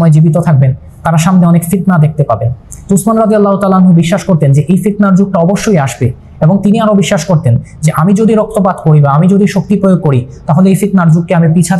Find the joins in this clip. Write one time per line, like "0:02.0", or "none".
none